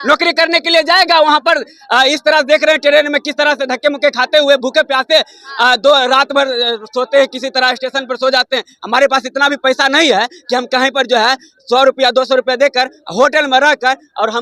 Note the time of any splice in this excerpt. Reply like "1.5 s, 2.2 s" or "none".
none